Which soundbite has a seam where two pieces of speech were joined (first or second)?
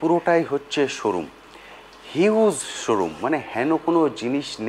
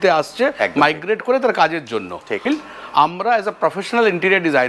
second